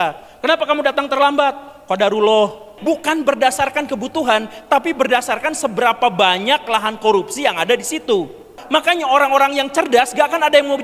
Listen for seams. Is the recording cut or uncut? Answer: cut